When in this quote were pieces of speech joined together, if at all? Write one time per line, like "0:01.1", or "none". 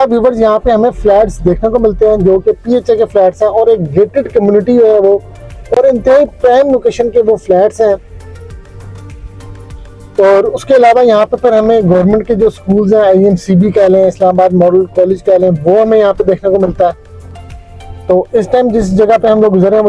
none